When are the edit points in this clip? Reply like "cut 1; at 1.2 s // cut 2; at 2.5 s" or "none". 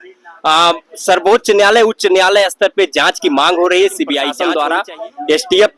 cut 1; at 4.3 s